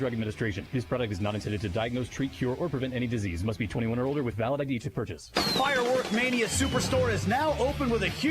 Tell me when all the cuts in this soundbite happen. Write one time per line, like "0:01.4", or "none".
0:05.3